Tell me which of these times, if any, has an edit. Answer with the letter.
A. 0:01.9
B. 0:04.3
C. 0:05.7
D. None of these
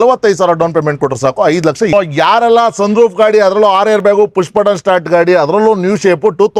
A